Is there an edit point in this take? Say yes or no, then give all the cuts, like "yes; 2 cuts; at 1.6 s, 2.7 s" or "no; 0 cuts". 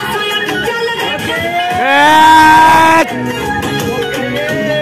yes; 2 cuts; at 1.1 s, 3.4 s